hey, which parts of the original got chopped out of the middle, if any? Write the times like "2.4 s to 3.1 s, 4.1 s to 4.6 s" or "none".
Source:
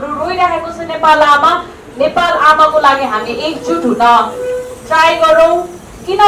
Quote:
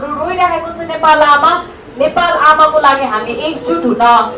none